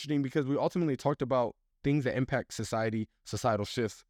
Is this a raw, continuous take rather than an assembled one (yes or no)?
yes